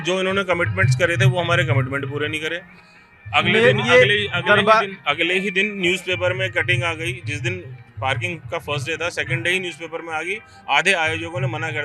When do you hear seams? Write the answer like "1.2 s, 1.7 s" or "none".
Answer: none